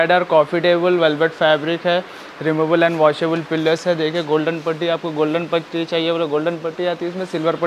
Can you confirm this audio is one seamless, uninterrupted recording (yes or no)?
yes